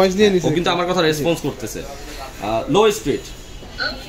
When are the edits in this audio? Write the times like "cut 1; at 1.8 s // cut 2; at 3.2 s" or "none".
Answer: none